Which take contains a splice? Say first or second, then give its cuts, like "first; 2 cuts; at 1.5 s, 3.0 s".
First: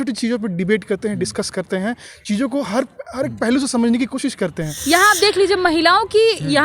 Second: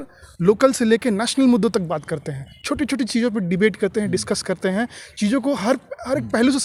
first; 1 cut; at 4.7 s